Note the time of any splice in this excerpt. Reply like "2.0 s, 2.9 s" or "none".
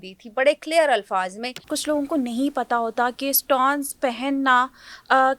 1.7 s